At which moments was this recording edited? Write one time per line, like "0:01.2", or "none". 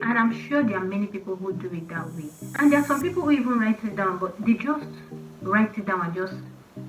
0:02.6